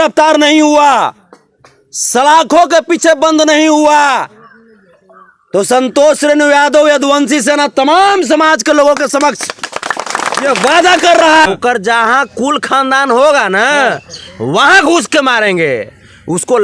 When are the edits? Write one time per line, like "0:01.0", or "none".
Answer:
0:11.5